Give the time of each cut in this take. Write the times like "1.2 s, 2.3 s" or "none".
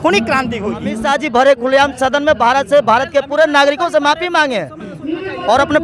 1.0 s